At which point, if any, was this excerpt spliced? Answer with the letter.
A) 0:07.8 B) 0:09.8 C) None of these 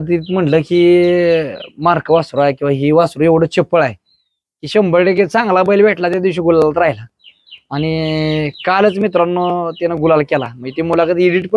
C